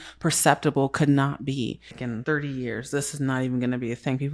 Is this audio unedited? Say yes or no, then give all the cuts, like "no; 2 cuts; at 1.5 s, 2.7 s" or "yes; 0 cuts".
no; 1 cut; at 1.9 s